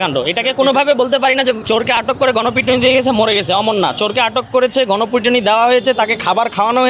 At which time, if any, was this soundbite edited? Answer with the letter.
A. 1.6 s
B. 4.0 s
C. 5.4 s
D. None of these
A